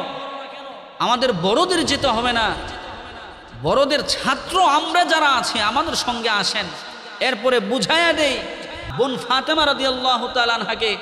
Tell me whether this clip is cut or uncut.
cut